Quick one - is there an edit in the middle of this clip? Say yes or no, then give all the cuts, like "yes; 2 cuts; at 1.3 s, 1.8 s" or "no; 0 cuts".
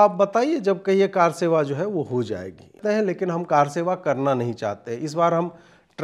yes; 1 cut; at 2.8 s